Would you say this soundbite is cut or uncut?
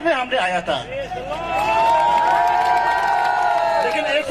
uncut